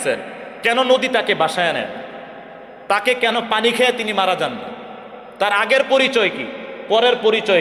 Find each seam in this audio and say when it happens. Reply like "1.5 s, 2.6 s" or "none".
none